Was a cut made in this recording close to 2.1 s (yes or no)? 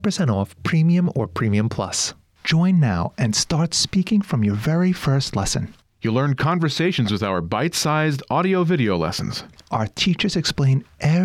yes